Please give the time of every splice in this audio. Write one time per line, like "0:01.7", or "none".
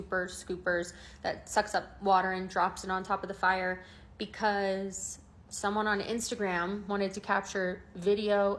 none